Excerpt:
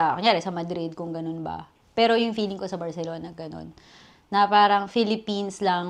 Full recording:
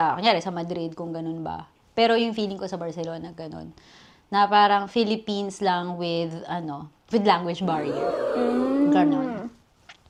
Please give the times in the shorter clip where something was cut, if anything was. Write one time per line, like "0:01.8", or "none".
none